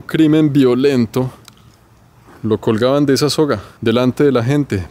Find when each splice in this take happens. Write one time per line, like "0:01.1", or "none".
0:03.7